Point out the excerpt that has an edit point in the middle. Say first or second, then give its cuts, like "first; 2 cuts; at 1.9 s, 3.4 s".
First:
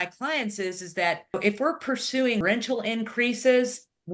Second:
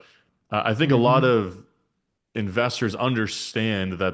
first; 2 cuts; at 1.3 s, 2.4 s